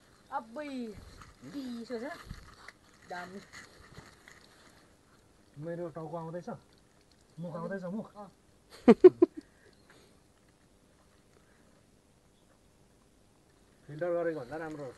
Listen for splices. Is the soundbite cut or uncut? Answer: uncut